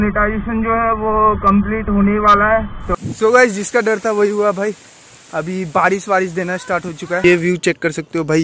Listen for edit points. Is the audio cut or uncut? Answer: cut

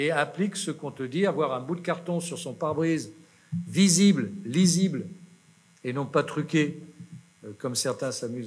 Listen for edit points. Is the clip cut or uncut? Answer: uncut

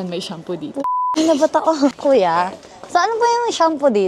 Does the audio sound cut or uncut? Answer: cut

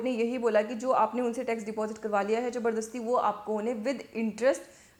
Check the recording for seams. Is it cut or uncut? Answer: uncut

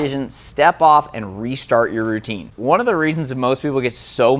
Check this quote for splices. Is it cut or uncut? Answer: cut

